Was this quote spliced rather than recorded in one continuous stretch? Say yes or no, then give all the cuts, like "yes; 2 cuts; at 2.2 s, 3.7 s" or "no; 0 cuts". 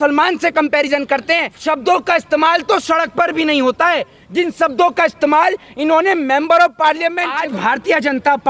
yes; 2 cuts; at 1.5 s, 7.3 s